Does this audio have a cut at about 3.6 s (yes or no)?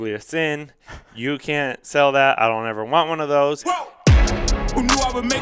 yes